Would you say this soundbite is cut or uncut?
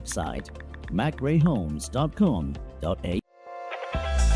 cut